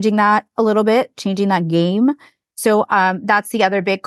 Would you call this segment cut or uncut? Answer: uncut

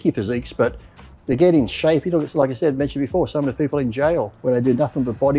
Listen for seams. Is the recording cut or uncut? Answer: cut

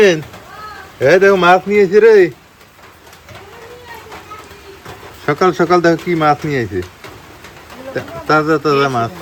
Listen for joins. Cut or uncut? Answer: uncut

